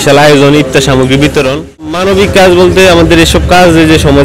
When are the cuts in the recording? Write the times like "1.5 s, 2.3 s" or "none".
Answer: 2.0 s